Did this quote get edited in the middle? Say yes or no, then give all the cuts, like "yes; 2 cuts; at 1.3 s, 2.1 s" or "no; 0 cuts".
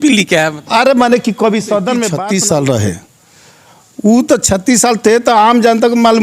yes; 1 cut; at 2.1 s